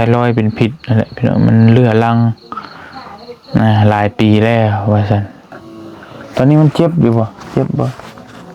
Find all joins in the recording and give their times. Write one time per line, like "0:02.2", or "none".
0:05.5